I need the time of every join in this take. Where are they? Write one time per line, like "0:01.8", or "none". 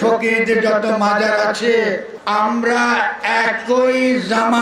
0:02.1